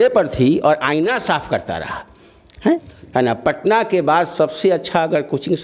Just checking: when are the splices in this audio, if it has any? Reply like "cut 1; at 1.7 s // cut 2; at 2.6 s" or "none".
cut 1; at 2.9 s